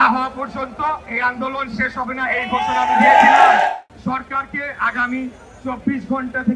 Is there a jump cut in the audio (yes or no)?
yes